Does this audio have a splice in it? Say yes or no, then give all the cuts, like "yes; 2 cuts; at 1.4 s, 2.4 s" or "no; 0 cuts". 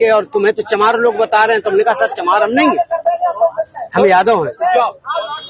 no; 0 cuts